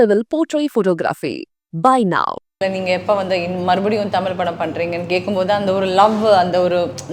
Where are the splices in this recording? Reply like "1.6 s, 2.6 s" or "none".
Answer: 2.6 s